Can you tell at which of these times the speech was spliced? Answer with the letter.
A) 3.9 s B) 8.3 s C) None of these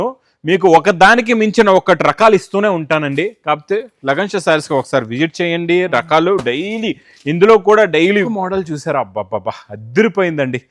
B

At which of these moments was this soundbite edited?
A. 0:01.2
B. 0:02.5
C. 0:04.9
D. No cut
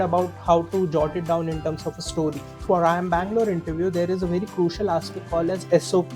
B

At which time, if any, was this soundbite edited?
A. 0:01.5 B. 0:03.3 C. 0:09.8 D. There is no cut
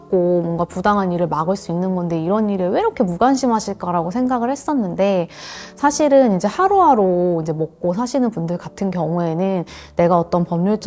D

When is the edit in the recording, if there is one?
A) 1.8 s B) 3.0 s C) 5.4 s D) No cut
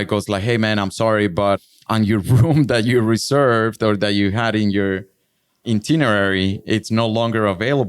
A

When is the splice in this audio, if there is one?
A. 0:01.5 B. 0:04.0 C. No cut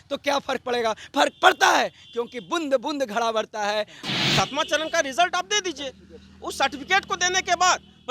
B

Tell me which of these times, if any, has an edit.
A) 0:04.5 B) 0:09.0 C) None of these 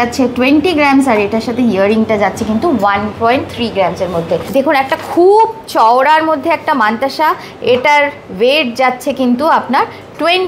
A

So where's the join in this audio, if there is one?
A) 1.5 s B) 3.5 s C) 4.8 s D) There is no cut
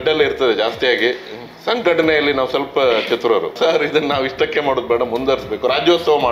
B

